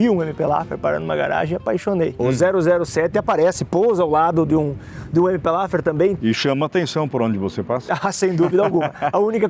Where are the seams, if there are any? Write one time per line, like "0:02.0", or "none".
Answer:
0:02.2
0:06.2